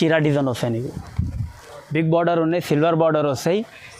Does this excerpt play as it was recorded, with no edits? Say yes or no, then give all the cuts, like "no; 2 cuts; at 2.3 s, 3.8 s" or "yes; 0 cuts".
yes; 0 cuts